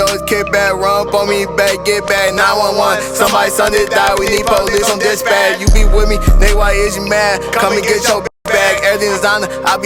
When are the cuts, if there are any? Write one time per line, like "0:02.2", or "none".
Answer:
none